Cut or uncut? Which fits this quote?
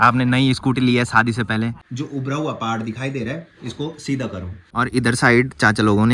cut